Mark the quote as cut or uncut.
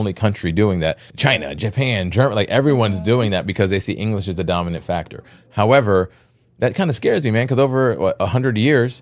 cut